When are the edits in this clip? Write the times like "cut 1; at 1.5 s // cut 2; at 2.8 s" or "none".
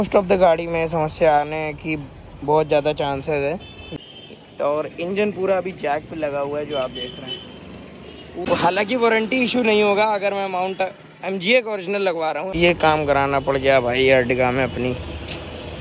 cut 1; at 3.8 s // cut 2; at 8.4 s // cut 3; at 12.5 s